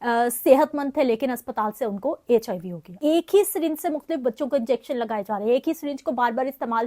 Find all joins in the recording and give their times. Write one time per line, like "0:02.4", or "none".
0:02.9